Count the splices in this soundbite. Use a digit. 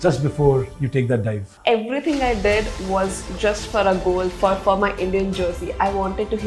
1